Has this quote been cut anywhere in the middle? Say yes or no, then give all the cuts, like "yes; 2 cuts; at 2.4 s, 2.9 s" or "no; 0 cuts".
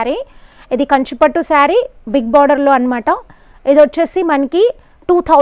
no; 0 cuts